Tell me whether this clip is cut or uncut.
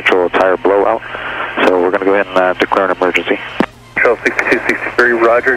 uncut